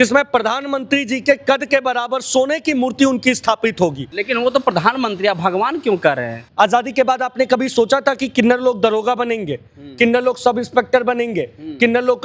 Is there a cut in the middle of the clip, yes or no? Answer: yes